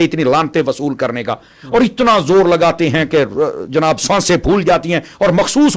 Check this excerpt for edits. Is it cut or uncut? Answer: uncut